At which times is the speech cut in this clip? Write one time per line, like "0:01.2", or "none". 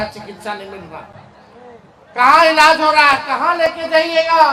none